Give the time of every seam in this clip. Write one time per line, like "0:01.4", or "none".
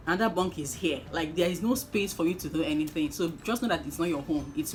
none